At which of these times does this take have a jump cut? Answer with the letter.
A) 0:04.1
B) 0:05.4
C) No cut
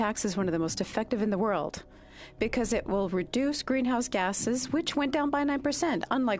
C